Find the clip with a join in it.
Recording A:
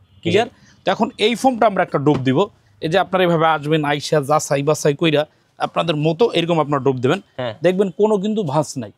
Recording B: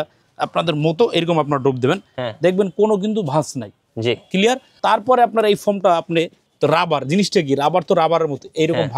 B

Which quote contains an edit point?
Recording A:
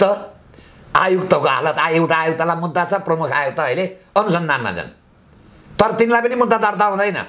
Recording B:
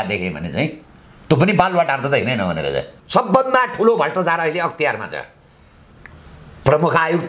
B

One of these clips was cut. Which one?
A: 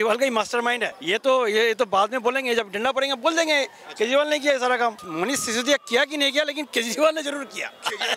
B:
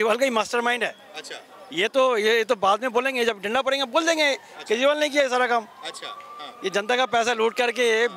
A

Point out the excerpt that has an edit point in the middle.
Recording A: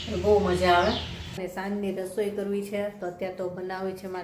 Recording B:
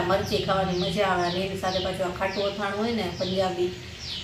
A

